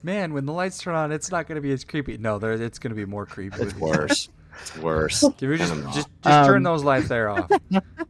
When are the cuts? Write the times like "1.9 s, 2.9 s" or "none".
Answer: none